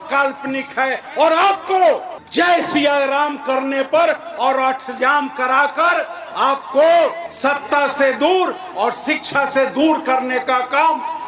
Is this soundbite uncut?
yes; 0 cuts

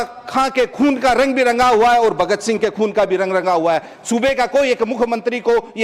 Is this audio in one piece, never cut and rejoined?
yes; 0 cuts

